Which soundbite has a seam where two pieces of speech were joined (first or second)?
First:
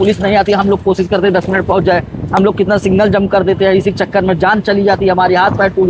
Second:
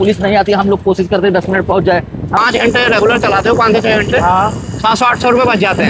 second